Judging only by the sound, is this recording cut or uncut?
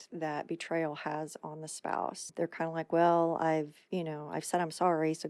cut